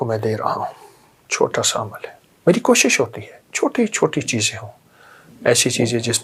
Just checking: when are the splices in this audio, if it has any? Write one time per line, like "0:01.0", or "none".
none

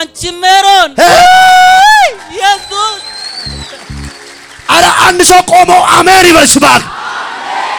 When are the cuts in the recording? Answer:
none

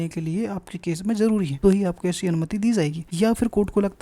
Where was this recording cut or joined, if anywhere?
0:01.5
0:03.0

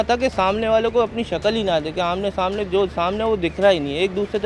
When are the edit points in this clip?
none

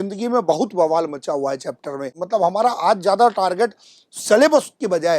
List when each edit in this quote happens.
0:02.1

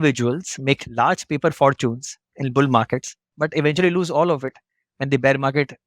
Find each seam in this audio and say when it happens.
0:03.2

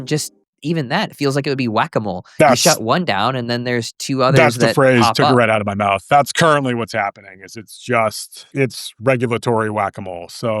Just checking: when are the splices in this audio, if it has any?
0:08.4

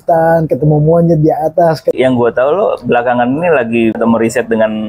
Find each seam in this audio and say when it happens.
0:01.9
0:04.0

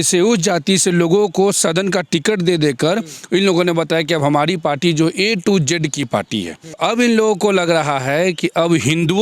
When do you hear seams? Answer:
0:06.8

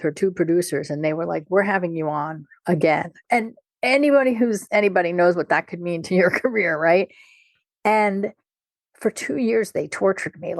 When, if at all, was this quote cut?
0:03.2

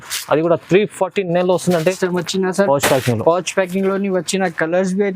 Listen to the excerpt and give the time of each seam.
0:02.0

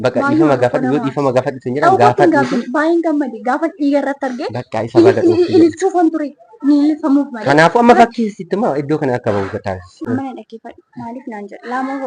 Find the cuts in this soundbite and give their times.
0:09.9

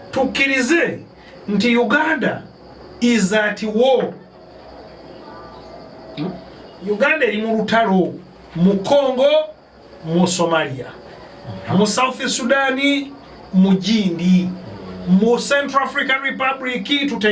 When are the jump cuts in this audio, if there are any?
none

